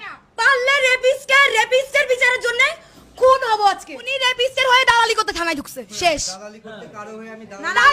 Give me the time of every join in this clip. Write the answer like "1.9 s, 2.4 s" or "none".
4.2 s